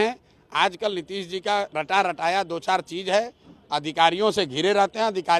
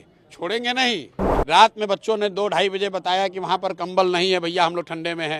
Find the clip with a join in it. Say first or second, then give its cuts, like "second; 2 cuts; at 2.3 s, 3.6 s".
second; 1 cut; at 1.4 s